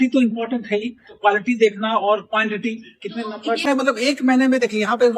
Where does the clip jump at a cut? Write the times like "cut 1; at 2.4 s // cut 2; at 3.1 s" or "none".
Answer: cut 1; at 3.7 s